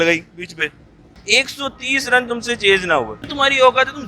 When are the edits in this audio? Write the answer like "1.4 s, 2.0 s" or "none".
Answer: 1.1 s, 3.2 s